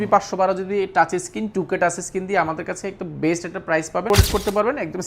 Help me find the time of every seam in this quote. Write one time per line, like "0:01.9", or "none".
0:04.1